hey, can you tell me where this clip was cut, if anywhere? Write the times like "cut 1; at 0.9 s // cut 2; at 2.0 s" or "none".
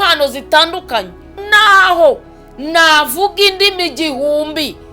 cut 1; at 1.4 s